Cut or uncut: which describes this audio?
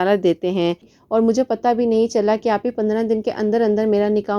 cut